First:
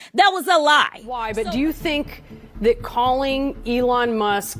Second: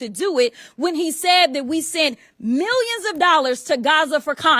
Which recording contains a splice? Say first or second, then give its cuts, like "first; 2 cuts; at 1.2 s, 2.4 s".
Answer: first; 1 cut; at 1.2 s